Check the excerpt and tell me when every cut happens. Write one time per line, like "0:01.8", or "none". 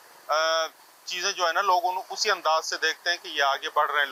none